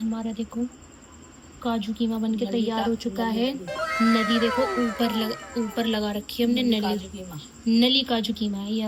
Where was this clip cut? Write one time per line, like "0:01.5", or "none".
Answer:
none